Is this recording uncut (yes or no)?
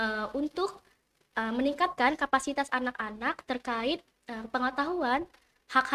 yes